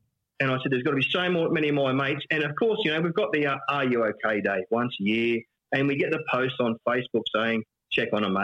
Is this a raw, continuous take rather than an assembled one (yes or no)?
yes